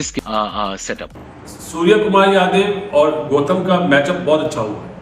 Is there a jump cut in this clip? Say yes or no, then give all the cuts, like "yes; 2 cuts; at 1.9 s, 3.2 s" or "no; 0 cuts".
yes; 1 cut; at 1.2 s